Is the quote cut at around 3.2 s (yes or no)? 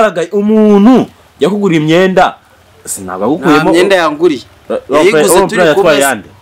no